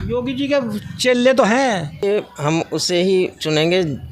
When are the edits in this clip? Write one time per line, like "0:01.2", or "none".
0:01.9